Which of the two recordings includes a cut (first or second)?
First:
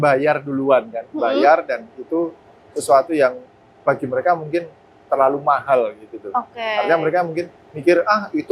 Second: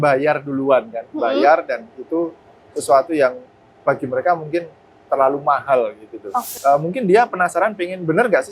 second